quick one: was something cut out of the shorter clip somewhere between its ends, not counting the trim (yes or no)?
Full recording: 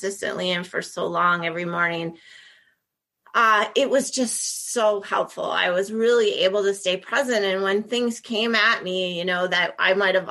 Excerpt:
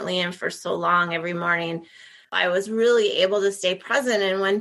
yes